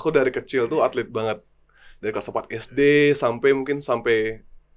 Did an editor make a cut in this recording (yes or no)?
no